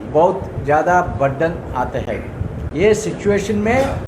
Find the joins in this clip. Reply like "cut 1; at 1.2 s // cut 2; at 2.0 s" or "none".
none